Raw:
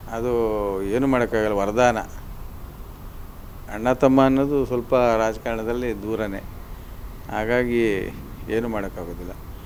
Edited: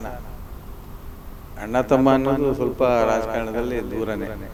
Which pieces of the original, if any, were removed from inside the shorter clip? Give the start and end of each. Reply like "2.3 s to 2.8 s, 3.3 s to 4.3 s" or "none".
none